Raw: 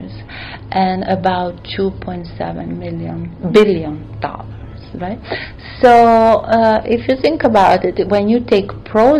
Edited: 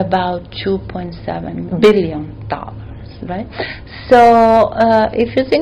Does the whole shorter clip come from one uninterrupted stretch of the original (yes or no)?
no